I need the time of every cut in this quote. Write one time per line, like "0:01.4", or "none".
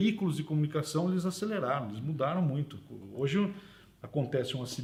none